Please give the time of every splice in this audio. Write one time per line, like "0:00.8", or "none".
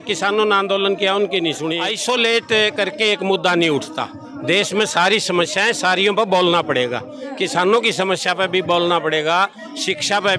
0:01.9